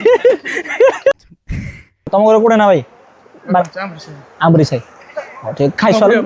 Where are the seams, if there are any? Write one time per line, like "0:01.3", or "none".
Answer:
0:02.1